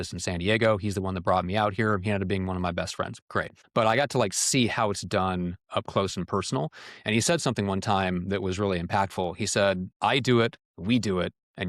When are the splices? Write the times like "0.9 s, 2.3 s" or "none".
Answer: 3.6 s, 9.9 s, 10.7 s